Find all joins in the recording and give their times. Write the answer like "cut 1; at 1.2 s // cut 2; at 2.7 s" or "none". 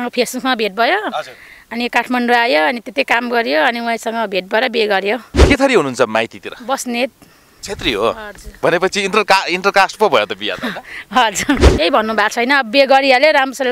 cut 1; at 5.4 s // cut 2; at 11.7 s